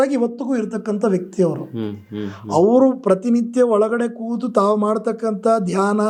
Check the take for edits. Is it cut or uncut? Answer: uncut